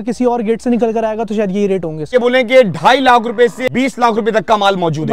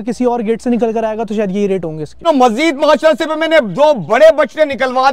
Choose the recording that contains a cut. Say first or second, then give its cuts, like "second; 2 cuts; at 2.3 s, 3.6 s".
first; 2 cuts; at 2.1 s, 3.6 s